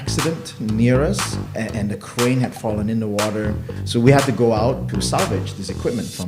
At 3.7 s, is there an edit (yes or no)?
yes